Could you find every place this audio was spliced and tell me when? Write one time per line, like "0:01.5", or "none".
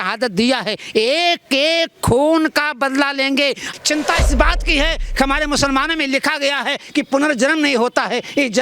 0:03.6